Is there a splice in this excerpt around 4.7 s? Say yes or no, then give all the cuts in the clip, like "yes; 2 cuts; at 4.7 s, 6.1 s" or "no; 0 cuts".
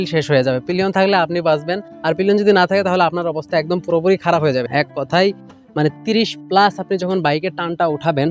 yes; 1 cut; at 4.7 s